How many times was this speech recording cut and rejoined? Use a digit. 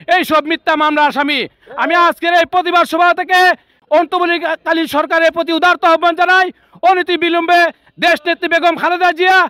0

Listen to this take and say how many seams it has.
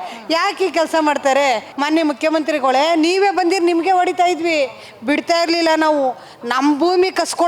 1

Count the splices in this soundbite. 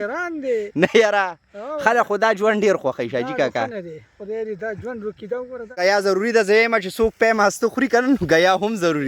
1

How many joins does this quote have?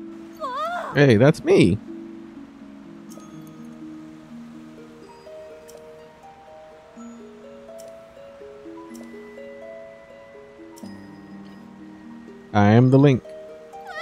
0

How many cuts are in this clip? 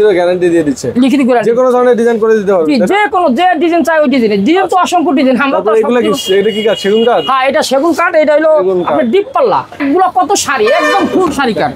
1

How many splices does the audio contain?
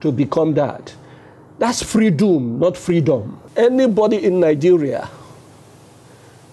1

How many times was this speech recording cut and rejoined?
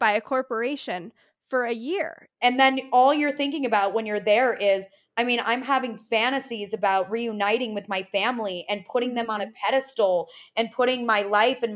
1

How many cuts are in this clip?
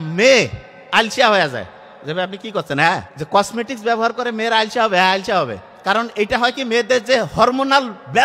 1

